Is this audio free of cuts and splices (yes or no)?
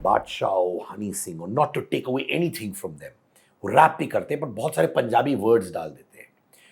yes